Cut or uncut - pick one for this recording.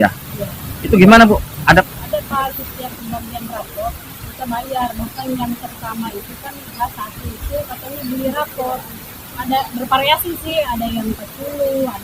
cut